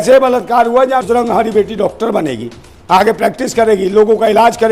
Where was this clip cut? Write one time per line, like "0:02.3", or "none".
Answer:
0:01.0